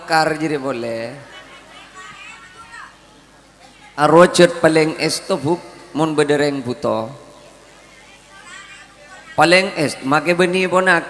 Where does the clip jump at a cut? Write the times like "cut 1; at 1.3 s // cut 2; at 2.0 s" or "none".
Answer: cut 1; at 4.0 s